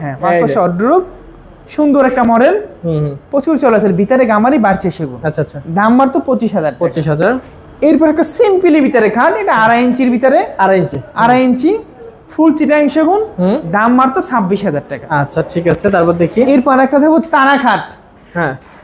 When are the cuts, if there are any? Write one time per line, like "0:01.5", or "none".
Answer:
none